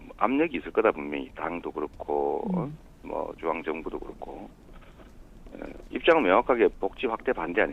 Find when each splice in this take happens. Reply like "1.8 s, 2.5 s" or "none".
2.1 s